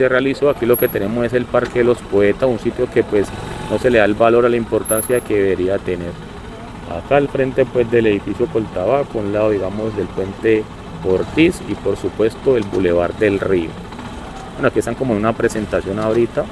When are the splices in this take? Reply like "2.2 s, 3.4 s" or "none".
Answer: none